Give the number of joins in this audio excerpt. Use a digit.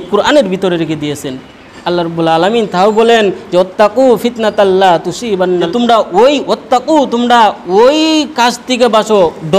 2